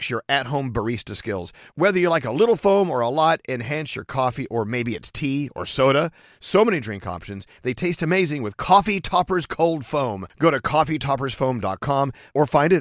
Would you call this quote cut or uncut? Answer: uncut